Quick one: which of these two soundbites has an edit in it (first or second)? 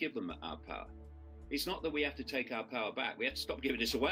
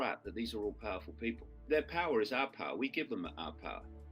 second